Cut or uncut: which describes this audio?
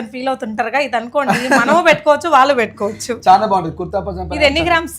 uncut